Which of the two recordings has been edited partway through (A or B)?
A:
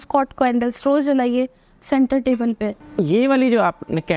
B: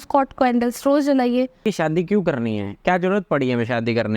B